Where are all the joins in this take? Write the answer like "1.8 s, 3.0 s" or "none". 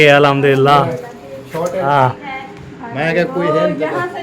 1.8 s